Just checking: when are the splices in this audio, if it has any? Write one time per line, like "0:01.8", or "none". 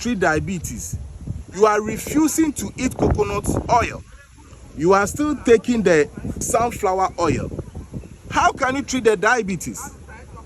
0:06.4